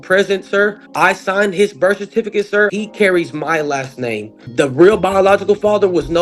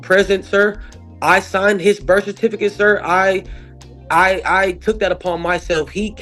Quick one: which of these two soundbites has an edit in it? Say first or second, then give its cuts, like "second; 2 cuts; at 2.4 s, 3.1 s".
first; 3 cuts; at 0.8 s, 2.7 s, 4.4 s